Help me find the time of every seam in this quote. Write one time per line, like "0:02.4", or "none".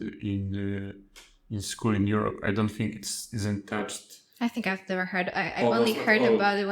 none